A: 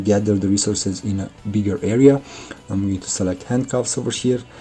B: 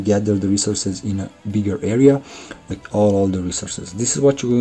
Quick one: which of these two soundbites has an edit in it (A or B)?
B